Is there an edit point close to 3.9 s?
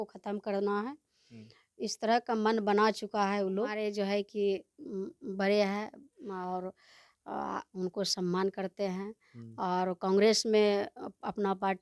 yes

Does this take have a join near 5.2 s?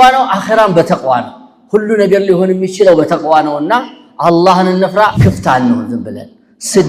yes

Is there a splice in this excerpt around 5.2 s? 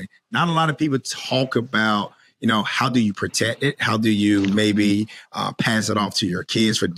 no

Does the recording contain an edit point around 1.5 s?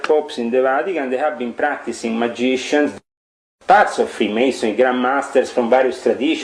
no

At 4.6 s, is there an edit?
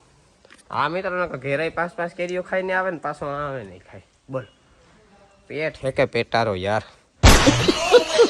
yes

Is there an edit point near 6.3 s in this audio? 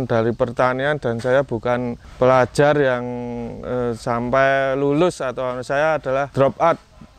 yes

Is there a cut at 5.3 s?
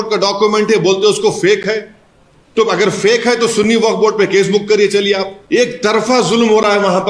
yes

